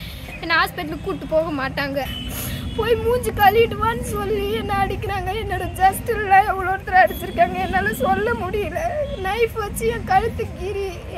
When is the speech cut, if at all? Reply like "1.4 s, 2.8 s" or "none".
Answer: 2.1 s